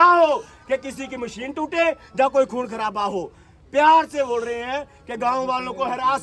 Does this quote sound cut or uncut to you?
uncut